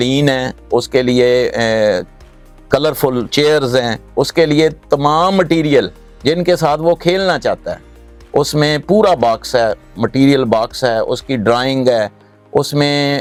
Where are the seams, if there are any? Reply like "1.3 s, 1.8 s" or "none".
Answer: none